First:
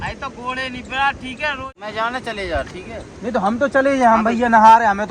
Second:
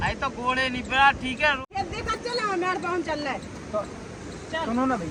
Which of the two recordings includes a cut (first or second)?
first